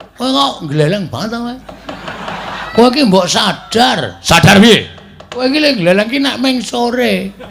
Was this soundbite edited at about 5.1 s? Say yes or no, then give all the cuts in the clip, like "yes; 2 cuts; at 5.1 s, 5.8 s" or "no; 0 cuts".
no; 1 cut; at 2.6 s